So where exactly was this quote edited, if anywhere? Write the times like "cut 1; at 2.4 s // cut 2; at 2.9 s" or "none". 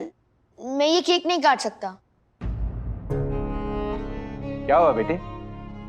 none